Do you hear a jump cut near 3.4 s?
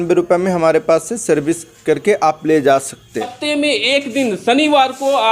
yes; 1 cut; at 3.4 s

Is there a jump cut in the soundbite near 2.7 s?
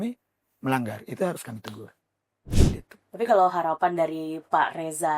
yes; 1 cut; at 2.7 s

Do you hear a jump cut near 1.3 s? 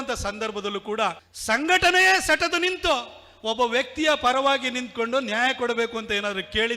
yes; 1 cut; at 1.3 s

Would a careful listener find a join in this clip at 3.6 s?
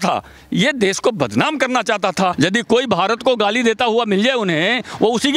no; 1 cut; at 2.3 s

